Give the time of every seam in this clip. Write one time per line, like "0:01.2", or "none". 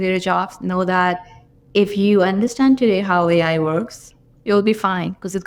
none

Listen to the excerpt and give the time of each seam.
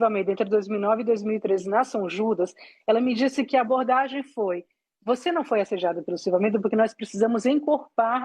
none

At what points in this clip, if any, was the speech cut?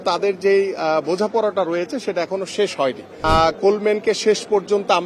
0:03.2

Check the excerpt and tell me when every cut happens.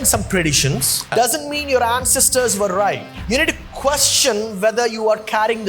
0:01.1
0:03.2

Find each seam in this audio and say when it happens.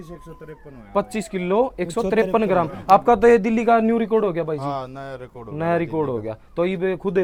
none

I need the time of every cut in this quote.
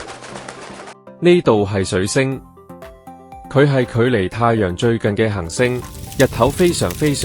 0:00.9

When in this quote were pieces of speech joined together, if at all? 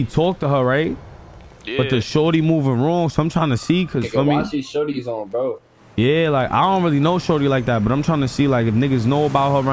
none

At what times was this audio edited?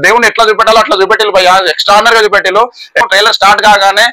0:03.0

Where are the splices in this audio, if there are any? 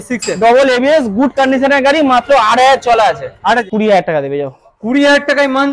0:03.7

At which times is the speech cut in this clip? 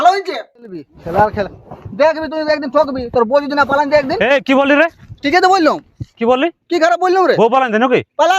0:00.9

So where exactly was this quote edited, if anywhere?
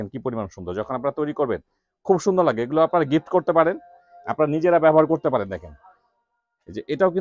none

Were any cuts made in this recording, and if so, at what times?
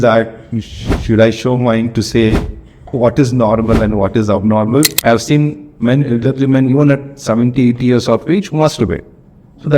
0:04.9

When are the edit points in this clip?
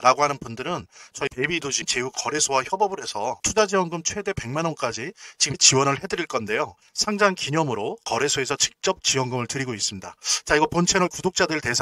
0:03.4

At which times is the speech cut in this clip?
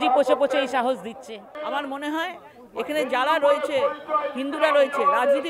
0:01.5

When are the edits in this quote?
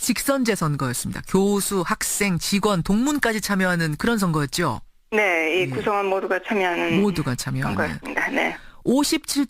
0:04.9

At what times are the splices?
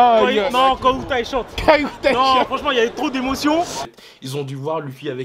0:03.8

